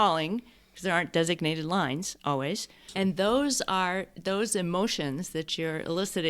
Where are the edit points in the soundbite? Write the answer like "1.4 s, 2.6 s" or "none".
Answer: 2.8 s